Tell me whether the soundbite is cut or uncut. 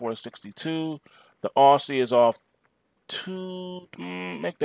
cut